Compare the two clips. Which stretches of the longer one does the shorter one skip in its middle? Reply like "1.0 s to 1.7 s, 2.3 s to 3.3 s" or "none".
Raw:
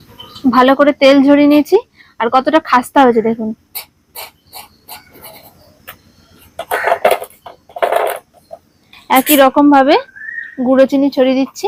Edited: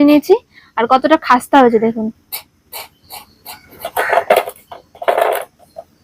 5.2 s to 6.5 s